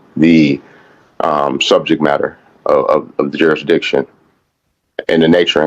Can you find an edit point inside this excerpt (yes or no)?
no